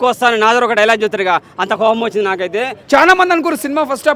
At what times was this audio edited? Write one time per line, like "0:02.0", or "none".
0:02.8